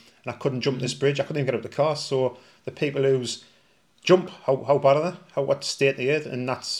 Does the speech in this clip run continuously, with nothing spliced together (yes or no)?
yes